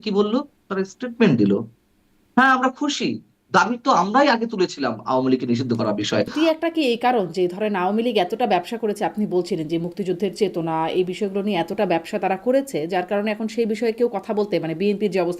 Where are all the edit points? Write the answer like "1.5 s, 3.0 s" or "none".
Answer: 6.3 s